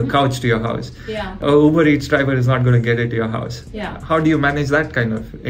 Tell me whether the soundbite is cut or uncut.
uncut